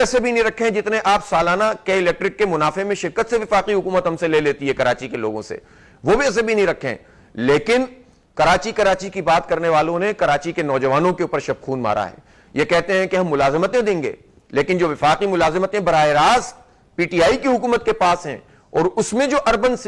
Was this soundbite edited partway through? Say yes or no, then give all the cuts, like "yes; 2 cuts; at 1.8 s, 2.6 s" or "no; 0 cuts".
no; 0 cuts